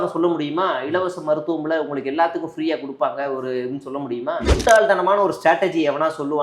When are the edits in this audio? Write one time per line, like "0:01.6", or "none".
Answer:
0:04.6